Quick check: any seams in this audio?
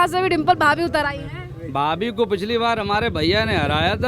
no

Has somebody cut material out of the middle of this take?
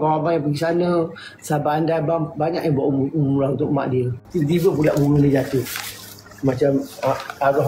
yes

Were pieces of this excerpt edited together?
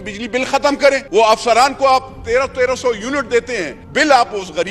yes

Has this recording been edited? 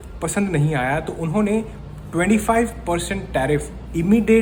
no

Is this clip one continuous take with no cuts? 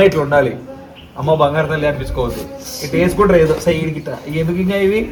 yes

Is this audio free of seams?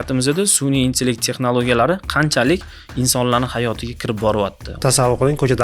no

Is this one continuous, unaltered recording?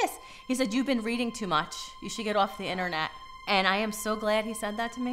no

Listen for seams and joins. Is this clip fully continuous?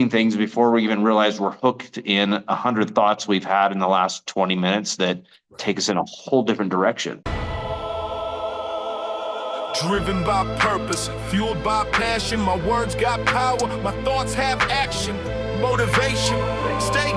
no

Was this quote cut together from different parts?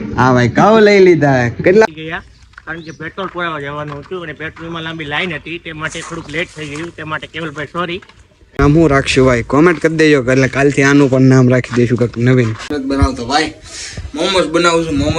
yes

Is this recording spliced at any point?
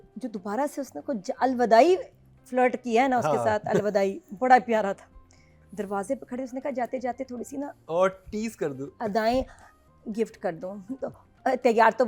no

